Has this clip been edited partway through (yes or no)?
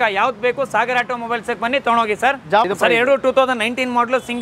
yes